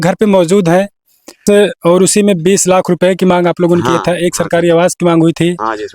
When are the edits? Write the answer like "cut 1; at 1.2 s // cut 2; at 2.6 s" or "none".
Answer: cut 1; at 1.4 s

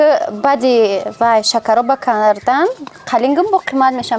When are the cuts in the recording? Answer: none

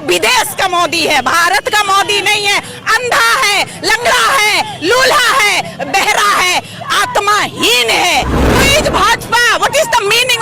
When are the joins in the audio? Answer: cut 1; at 8.6 s

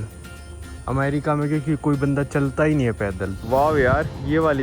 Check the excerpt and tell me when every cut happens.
cut 1; at 3.3 s

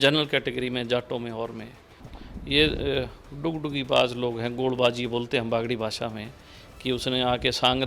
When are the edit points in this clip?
cut 1; at 2.0 s

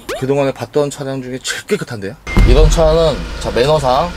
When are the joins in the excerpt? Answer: cut 1; at 2.2 s

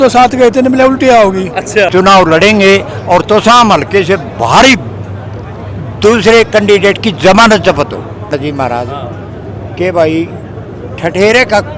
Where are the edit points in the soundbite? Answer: cut 1; at 1.9 s // cut 2; at 8.3 s

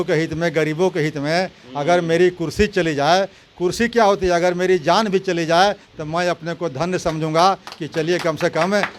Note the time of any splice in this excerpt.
none

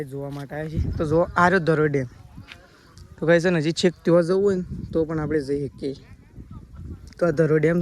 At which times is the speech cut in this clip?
none

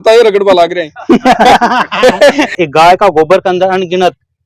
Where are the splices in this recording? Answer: cut 1; at 2.5 s

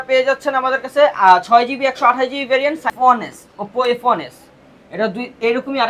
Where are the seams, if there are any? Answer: cut 1; at 2.9 s

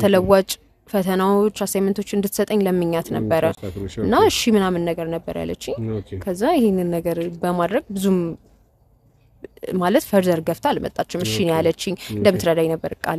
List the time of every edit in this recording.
none

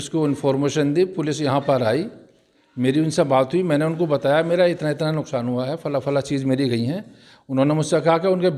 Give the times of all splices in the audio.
none

